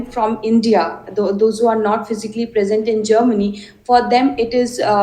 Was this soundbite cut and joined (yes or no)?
no